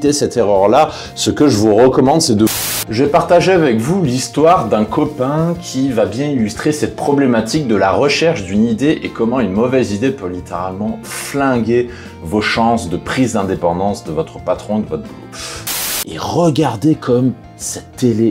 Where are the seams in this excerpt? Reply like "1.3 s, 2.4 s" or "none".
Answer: 2.5 s, 15.8 s